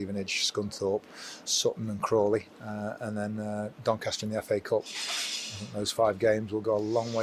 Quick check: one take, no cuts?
yes; 0 cuts

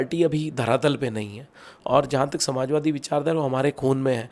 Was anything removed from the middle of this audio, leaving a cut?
no; 0 cuts

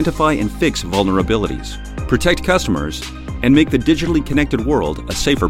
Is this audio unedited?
yes; 0 cuts

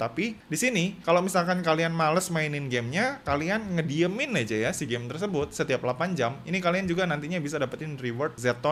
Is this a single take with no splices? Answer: yes; 0 cuts

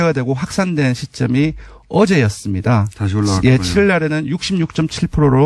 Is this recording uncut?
yes; 0 cuts

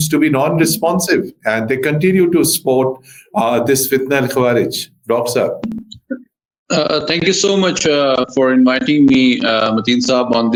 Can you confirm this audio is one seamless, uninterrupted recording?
yes; 0 cuts

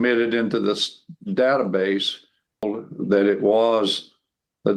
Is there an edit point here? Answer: yes; 1 cut; at 2.7 s

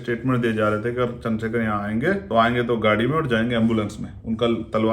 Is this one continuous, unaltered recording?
no; 1 cut; at 2.2 s

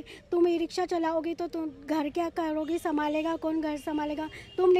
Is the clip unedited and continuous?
yes; 0 cuts

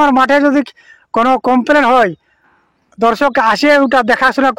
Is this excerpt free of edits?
yes; 0 cuts

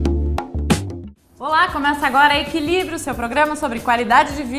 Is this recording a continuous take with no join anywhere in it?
no; 1 cut; at 1.0 s

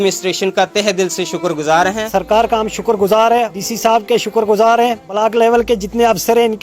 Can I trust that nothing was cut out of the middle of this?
no; 3 cuts; at 2.0 s, 3.6 s, 5.1 s

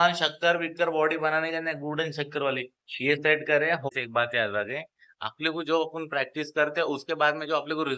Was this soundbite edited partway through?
yes; 1 cut; at 3.9 s

